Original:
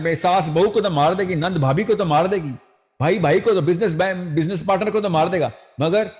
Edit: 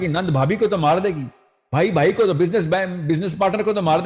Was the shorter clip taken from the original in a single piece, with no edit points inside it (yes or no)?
yes